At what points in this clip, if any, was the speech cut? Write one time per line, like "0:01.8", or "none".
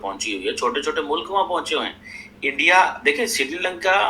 none